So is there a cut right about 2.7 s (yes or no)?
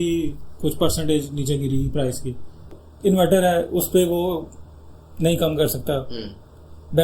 yes